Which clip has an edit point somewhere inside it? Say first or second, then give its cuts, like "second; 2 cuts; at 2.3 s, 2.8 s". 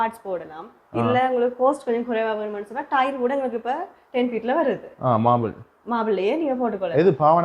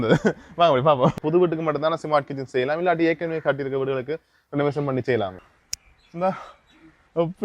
second; 2 cuts; at 1.2 s, 5.4 s